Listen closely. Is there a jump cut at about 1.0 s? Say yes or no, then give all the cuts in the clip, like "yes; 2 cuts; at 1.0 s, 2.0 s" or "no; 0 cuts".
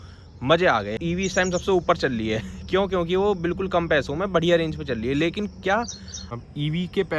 yes; 2 cuts; at 1.0 s, 6.3 s